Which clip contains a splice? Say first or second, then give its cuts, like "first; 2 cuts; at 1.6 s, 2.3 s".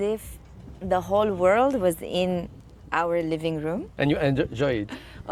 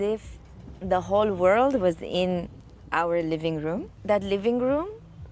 second; 1 cut; at 3.9 s